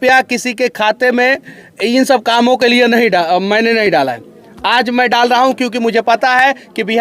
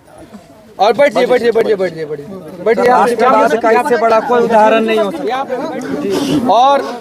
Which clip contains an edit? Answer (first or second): second